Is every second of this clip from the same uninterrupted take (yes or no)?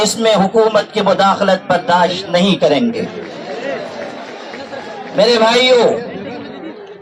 yes